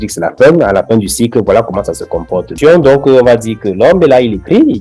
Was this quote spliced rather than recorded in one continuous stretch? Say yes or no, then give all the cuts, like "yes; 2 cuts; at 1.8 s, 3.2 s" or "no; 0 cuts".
yes; 1 cut; at 2.4 s